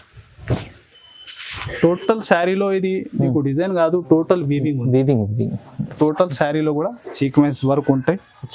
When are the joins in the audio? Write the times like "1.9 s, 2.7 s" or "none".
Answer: 5.9 s

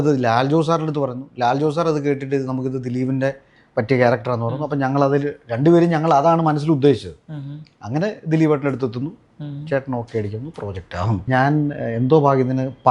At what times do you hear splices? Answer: 11.2 s

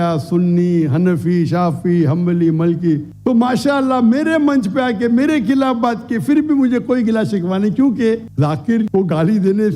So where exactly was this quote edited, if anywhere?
3.1 s, 8.3 s

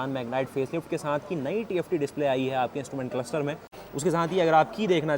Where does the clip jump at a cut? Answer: 3.8 s

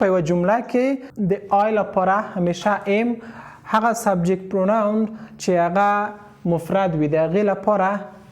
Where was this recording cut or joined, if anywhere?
1.1 s

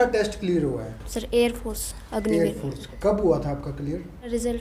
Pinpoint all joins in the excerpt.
none

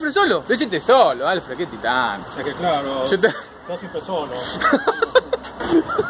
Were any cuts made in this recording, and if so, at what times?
none

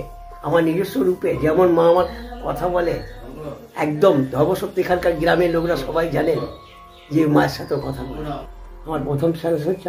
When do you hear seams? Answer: 8.4 s

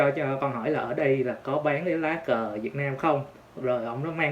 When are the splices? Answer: 3.4 s

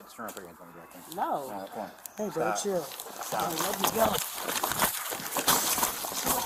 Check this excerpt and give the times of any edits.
none

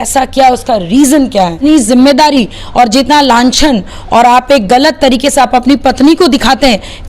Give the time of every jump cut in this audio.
1.6 s

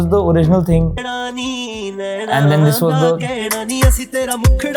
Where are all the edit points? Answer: none

